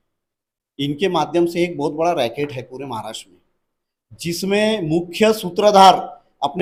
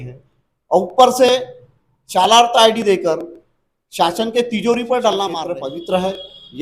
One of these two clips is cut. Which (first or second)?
second